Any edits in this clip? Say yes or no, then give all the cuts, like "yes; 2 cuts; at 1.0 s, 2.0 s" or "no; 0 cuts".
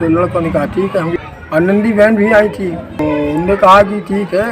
yes; 2 cuts; at 1.1 s, 3.0 s